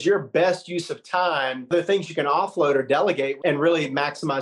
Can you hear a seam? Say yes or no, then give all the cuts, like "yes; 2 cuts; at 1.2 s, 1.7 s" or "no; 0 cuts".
yes; 2 cuts; at 1.7 s, 3.4 s